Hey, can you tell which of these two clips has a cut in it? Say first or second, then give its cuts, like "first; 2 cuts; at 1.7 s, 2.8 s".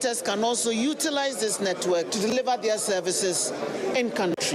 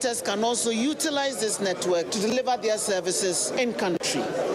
second; 1 cut; at 3.5 s